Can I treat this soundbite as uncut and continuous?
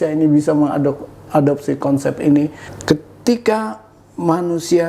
no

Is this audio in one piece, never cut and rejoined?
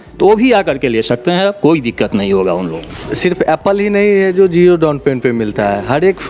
no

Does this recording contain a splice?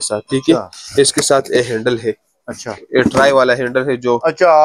no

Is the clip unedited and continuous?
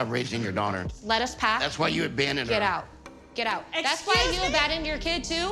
yes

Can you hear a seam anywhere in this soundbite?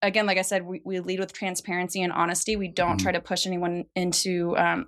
no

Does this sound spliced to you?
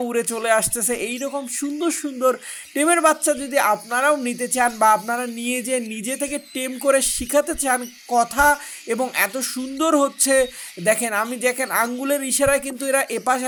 no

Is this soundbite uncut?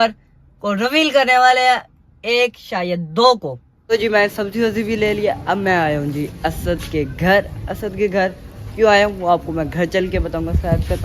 no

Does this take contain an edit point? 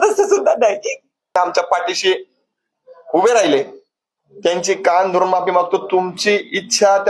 yes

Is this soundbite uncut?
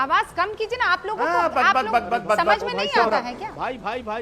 yes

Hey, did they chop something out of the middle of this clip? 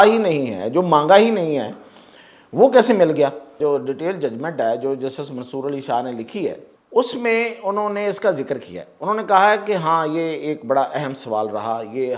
yes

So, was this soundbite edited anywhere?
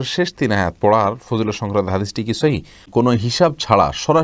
yes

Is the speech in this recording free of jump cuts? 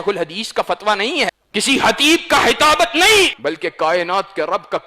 no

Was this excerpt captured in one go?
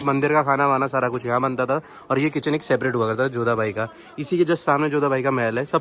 yes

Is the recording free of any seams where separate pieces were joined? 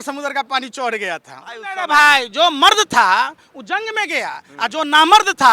no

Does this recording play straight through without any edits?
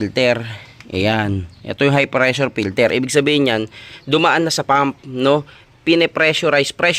yes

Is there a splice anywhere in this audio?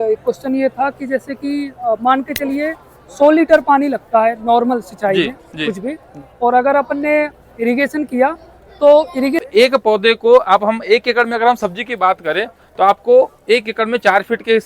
yes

